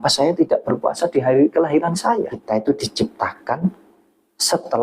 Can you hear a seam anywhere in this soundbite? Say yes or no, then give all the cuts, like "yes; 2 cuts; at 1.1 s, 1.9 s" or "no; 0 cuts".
yes; 1 cut; at 2.4 s